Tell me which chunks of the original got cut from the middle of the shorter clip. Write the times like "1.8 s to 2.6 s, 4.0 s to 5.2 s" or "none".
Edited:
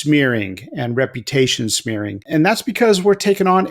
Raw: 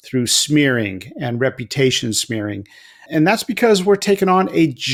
2.6 s to 3.0 s